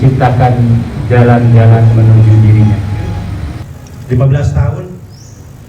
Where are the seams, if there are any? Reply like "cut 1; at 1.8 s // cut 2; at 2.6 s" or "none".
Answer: cut 1; at 3.6 s